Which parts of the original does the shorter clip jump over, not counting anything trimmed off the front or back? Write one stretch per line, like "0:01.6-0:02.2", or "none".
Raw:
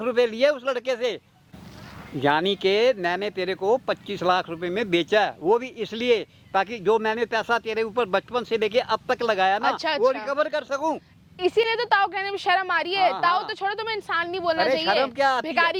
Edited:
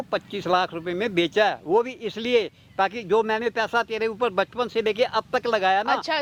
none